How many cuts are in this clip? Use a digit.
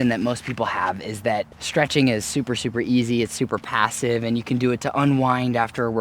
1